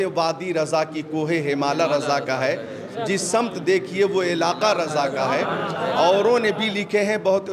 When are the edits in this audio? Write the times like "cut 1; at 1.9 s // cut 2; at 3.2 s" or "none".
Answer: none